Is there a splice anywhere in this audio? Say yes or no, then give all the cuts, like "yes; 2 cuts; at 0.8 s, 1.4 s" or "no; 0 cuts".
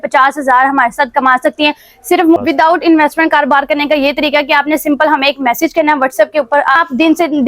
yes; 2 cuts; at 2.4 s, 6.8 s